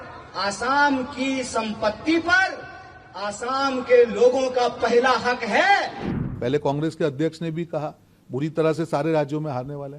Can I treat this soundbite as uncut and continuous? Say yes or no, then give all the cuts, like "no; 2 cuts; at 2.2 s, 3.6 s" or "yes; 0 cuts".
no; 1 cut; at 6.1 s